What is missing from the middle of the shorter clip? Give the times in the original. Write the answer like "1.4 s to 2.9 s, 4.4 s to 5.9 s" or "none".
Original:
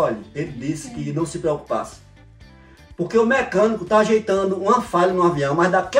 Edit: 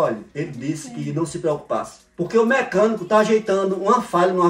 2.0 s to 2.8 s